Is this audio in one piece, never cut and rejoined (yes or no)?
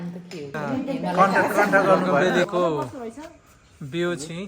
no